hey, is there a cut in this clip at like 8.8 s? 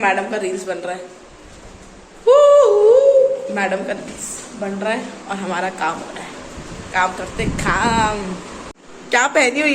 yes; 1 cut; at 8.8 s

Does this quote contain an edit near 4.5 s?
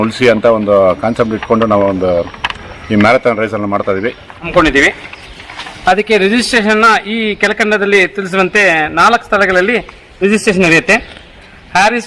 yes; 1 cut; at 4.5 s

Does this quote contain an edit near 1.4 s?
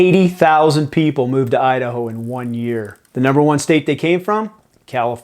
no; 1 cut; at 3.0 s

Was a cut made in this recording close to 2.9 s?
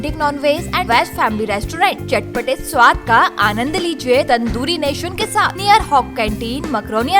no; 3 cuts; at 0.9 s, 4.3 s, 5.5 s

